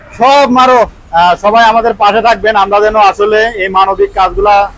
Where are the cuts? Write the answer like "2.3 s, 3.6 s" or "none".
1.0 s

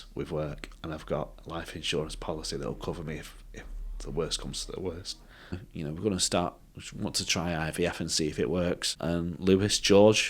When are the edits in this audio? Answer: 5.7 s, 8.9 s

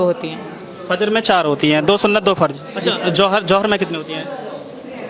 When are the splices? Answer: 2.7 s

